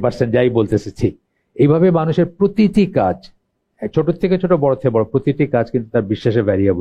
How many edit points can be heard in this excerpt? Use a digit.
0